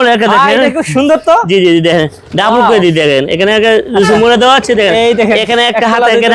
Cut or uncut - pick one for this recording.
uncut